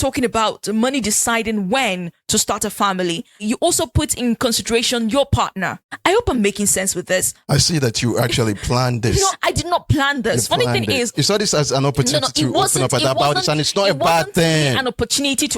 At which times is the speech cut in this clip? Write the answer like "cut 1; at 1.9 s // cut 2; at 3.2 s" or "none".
cut 1; at 3.4 s // cut 2; at 9.4 s // cut 3; at 11.1 s